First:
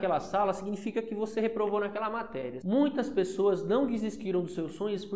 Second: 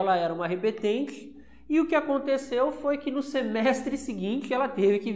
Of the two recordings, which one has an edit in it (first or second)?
first